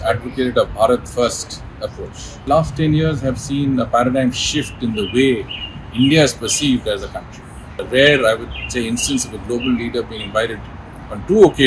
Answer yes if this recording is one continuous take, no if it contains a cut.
no